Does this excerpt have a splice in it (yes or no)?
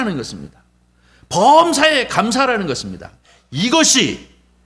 yes